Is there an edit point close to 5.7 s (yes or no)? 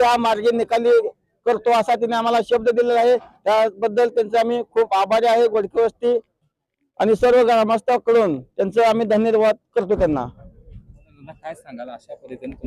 no